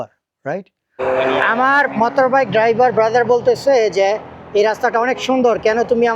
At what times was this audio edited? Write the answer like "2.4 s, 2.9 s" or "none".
1.0 s